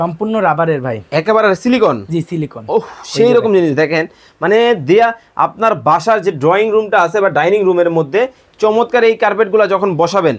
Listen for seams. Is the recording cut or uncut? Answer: uncut